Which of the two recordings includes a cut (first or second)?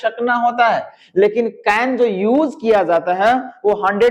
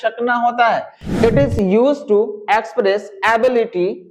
second